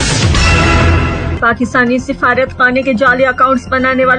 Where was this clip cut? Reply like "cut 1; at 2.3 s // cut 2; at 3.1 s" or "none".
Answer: cut 1; at 1.3 s